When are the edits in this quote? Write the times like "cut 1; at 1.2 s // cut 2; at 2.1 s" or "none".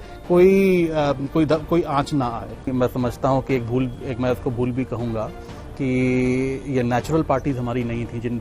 cut 1; at 2.7 s